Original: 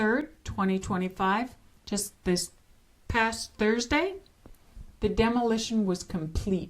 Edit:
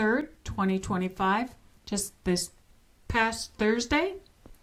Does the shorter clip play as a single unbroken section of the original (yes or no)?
yes